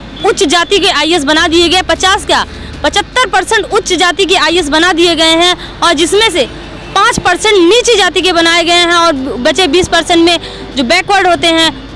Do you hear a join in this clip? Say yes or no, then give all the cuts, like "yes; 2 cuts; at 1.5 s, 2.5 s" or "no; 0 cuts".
no; 0 cuts